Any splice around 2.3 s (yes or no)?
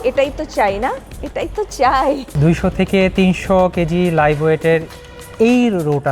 yes